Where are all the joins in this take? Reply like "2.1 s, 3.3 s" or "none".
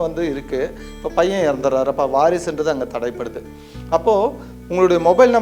none